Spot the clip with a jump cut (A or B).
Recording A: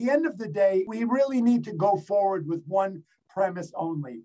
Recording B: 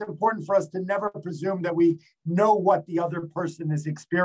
A